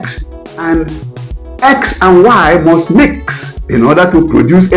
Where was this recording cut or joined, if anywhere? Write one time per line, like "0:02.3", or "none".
none